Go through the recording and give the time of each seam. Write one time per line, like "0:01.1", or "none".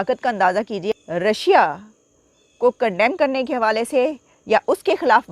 0:00.9